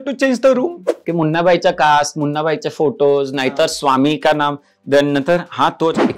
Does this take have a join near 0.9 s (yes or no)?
yes